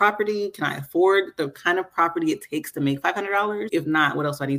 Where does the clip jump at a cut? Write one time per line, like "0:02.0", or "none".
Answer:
0:03.7